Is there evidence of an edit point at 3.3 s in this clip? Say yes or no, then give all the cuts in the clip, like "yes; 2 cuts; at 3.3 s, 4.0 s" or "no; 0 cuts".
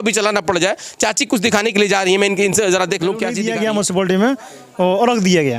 yes; 1 cut; at 3.3 s